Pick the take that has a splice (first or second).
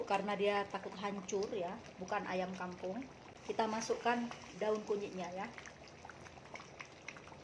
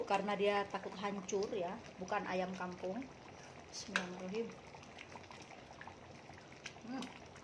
first